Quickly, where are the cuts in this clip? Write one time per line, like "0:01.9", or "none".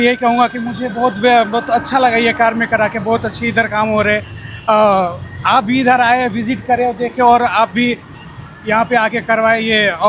none